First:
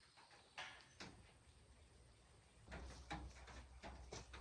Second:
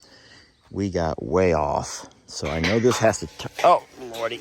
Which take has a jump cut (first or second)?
first